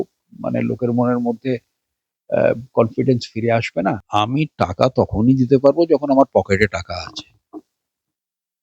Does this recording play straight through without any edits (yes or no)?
no